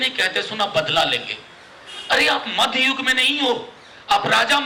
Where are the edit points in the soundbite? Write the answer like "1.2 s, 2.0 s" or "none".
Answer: none